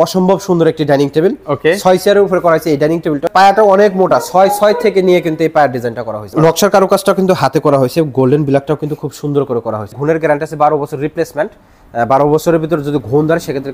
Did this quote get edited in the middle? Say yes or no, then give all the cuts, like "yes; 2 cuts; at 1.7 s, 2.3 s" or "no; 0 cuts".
yes; 3 cuts; at 3.2 s, 6.3 s, 9.9 s